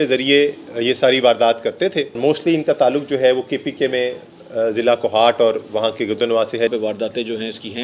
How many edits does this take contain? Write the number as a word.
two